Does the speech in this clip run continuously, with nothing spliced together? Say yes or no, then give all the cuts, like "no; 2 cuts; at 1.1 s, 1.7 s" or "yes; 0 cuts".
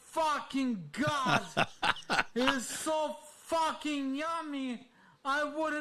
yes; 0 cuts